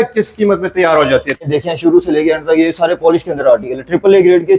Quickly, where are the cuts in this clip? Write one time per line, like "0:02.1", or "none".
0:01.4